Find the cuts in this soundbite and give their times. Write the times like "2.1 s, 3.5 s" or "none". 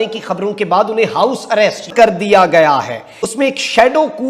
1.9 s, 3.1 s